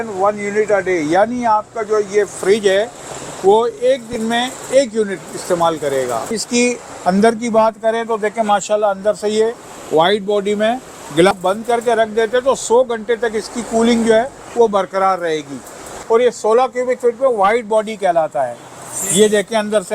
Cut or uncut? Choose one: cut